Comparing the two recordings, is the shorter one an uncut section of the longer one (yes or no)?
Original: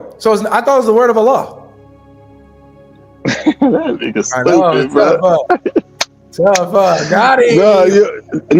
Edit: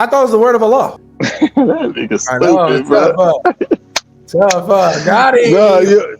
no